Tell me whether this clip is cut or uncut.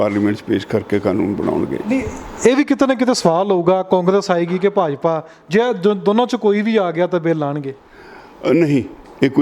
uncut